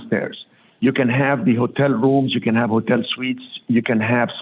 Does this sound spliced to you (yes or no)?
no